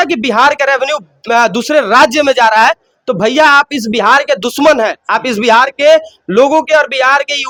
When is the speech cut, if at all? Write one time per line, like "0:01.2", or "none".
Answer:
none